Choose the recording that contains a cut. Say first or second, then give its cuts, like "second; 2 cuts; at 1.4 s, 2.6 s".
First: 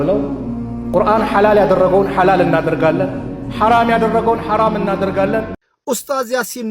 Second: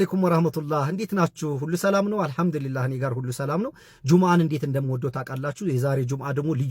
first; 1 cut; at 5.6 s